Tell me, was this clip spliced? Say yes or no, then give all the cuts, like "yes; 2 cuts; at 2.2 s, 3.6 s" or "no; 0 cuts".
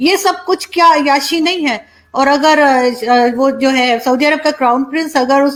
no; 0 cuts